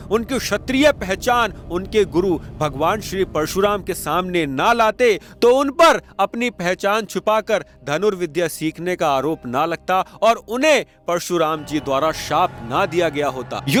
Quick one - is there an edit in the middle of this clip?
no; 0 cuts

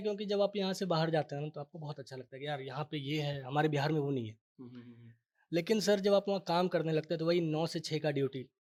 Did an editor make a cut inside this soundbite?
no; 0 cuts

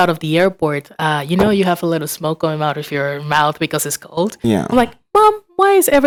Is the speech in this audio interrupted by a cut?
no; 0 cuts

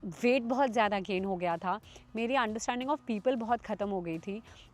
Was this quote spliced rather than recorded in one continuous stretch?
no; 0 cuts

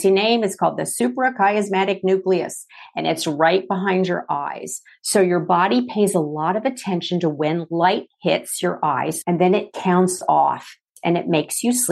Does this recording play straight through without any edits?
no; 2 cuts; at 9.2 s, 10.9 s

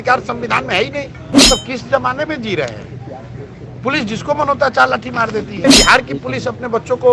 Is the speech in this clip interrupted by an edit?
yes; 2 cuts; at 1.3 s, 5.6 s

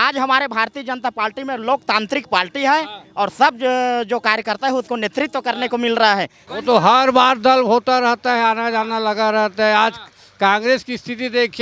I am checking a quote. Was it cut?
yes; 1 cut; at 6.4 s

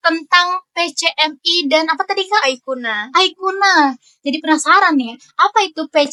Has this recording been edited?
no; 0 cuts

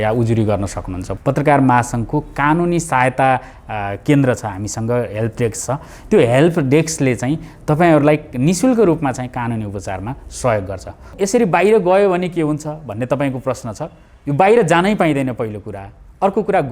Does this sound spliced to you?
yes; 2 cuts; at 1.1 s, 11.1 s

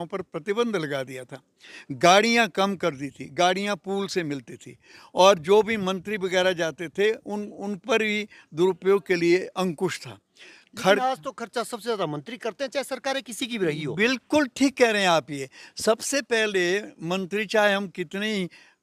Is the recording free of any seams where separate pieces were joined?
yes; 0 cuts

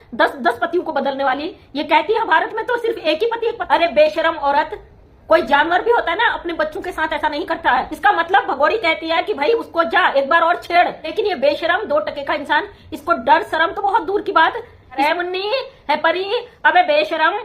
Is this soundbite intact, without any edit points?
no; 4 cuts; at 3.6 s, 7.9 s, 11.1 s, 15.0 s

